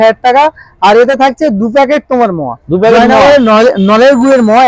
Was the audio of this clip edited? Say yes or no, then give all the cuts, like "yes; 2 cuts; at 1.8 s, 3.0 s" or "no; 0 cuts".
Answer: no; 0 cuts